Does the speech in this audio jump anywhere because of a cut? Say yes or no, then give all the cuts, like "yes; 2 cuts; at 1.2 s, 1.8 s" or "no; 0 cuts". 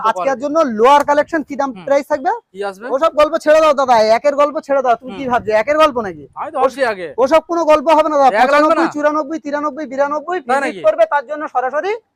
no; 0 cuts